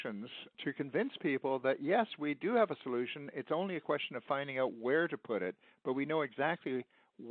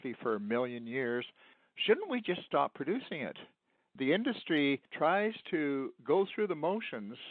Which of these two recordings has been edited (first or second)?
second